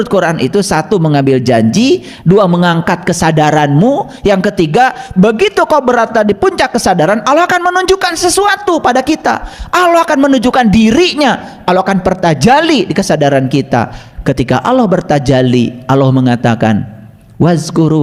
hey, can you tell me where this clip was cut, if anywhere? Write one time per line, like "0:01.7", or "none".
none